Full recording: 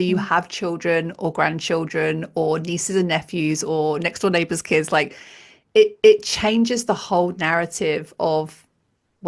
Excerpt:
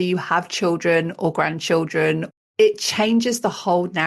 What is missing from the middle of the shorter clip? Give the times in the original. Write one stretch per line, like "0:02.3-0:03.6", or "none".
0:02.4-0:05.9